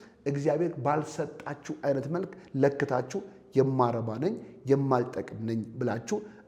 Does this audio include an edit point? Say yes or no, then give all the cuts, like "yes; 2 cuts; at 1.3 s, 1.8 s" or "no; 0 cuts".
no; 0 cuts